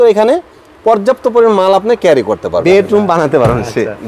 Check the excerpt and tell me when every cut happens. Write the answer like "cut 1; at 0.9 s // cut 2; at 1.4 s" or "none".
cut 1; at 2.6 s

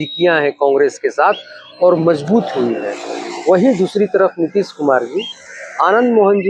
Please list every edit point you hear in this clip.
none

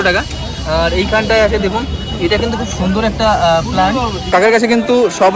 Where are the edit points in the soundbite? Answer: cut 1; at 4.3 s

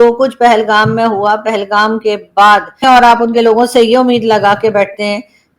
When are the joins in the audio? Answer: cut 1; at 2.8 s

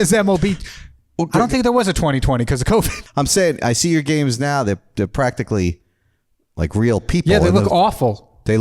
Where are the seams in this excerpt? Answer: cut 1; at 3.0 s

